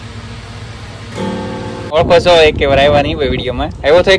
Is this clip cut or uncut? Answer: cut